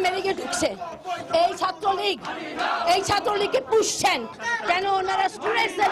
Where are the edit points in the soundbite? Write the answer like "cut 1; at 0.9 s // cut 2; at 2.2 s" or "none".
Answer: none